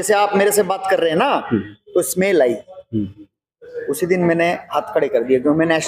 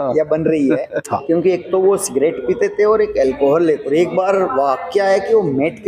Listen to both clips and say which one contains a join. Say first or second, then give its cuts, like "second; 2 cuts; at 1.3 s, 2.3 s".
second; 2 cuts; at 1.0 s, 3.8 s